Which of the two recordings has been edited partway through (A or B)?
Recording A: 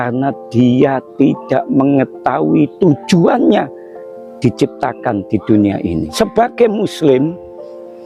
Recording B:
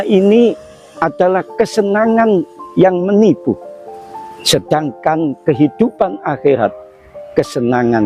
A